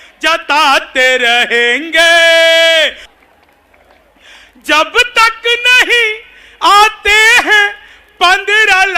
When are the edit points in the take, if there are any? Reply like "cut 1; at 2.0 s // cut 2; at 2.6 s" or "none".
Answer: cut 1; at 3.1 s